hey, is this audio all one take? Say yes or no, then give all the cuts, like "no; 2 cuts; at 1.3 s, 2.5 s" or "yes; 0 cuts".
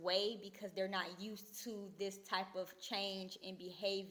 yes; 0 cuts